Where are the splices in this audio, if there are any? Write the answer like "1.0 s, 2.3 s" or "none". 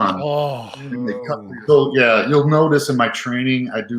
1.3 s